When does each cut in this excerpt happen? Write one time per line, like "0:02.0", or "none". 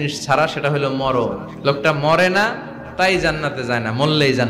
0:01.5